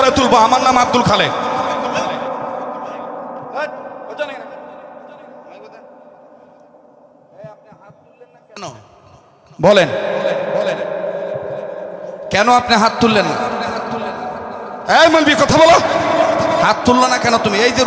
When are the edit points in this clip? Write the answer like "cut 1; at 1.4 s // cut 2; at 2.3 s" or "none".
cut 1; at 3.3 s